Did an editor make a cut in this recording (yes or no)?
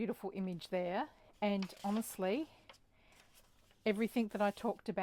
no